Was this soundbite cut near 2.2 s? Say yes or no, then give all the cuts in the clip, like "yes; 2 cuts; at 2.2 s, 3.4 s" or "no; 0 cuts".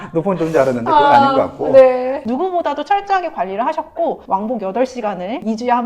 yes; 1 cut; at 2.2 s